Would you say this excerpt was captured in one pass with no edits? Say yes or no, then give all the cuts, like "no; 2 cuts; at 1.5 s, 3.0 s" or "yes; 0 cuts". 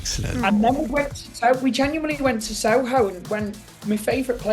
yes; 0 cuts